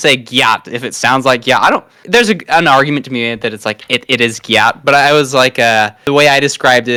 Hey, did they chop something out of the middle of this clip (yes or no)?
no